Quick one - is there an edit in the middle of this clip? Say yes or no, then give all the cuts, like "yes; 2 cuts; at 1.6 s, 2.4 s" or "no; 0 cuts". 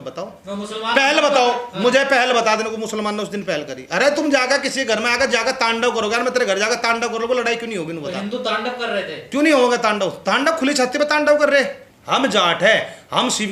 yes; 1 cut; at 11.8 s